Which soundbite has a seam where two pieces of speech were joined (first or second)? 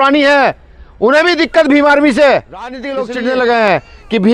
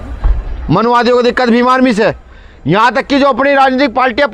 first